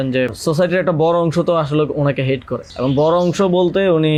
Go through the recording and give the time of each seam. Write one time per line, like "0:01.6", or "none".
none